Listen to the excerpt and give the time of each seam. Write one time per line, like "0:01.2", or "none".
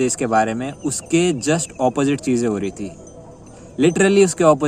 none